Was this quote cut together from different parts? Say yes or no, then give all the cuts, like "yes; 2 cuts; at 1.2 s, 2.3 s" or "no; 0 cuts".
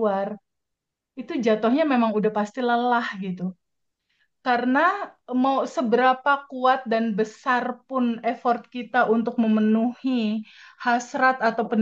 no; 0 cuts